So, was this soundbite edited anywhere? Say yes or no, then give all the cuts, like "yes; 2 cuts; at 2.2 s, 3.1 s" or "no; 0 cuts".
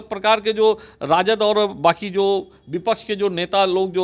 no; 0 cuts